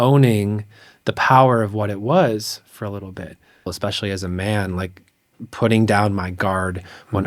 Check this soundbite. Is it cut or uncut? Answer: cut